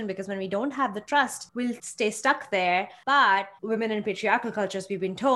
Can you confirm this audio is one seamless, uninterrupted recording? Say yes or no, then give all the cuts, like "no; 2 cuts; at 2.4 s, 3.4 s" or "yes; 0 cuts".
no; 3 cuts; at 1.7 s, 2.9 s, 3.5 s